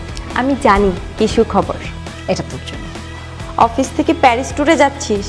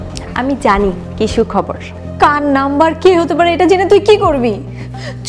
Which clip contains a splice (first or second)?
second